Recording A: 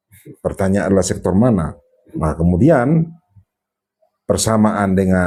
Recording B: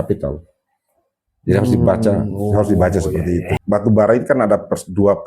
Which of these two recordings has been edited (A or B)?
B